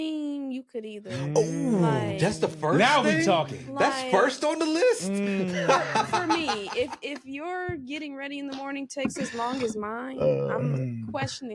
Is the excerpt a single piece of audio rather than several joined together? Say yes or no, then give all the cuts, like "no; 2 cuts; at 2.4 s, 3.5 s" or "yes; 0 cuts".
yes; 0 cuts